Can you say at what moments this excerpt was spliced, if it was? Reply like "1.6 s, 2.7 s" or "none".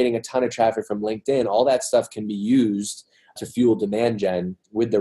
3.3 s